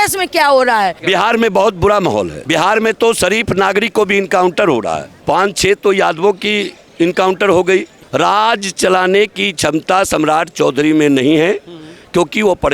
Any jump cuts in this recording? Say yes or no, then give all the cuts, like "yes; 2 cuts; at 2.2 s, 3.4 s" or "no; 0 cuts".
yes; 3 cuts; at 1.0 s, 5.1 s, 8.0 s